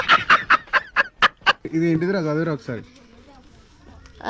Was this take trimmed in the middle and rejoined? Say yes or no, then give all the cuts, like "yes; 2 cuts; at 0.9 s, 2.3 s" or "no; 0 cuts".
no; 0 cuts